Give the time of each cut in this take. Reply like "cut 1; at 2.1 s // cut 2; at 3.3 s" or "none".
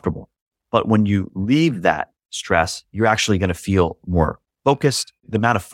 none